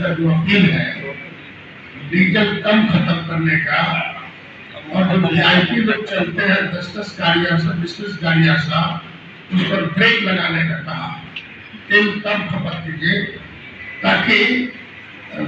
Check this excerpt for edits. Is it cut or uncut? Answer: uncut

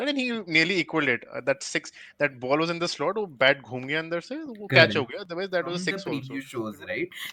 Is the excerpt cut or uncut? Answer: cut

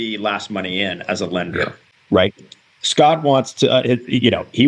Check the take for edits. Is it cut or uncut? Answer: uncut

